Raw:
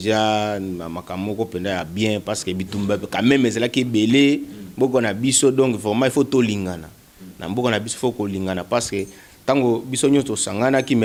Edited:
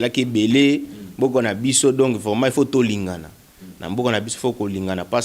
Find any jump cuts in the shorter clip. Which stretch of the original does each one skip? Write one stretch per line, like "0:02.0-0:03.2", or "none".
none